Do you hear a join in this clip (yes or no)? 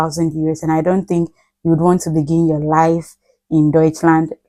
no